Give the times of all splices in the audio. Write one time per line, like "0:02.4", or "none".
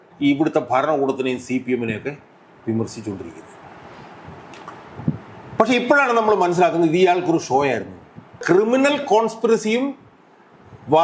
0:08.4